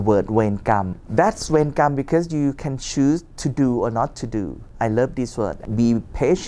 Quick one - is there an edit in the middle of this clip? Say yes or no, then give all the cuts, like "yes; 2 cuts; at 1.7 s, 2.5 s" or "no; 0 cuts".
yes; 3 cuts; at 1.0 s, 4.6 s, 5.6 s